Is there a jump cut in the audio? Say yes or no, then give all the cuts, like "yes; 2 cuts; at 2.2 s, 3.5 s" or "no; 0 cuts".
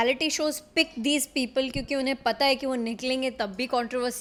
no; 0 cuts